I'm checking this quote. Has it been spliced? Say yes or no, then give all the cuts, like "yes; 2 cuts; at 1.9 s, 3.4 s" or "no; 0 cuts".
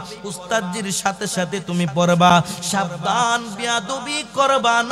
no; 0 cuts